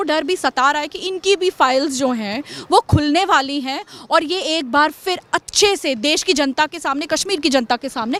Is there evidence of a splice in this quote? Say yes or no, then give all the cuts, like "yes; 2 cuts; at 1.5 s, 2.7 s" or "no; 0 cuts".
no; 0 cuts